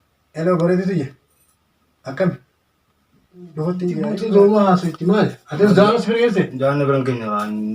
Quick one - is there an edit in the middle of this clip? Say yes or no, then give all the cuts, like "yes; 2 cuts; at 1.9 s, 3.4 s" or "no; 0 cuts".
yes; 1 cut; at 4.1 s